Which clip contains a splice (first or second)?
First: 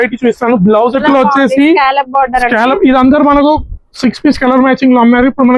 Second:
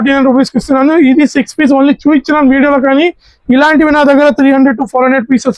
first